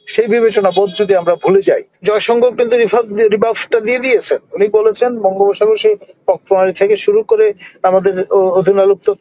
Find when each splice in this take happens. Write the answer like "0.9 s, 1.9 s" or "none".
2.0 s